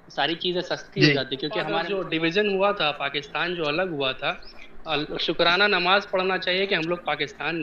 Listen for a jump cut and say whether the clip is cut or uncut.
cut